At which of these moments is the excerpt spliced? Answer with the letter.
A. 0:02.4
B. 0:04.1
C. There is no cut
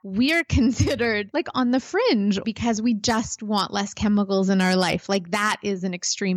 A